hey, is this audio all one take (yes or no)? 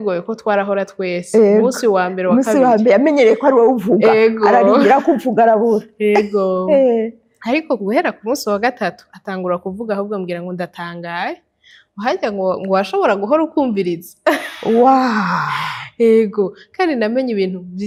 yes